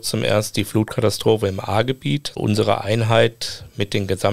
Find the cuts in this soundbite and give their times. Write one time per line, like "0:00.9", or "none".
0:02.3